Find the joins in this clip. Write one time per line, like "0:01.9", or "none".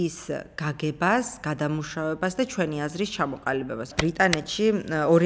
0:03.9